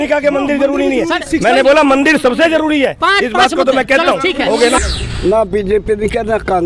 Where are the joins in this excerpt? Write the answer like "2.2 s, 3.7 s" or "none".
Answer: 4.8 s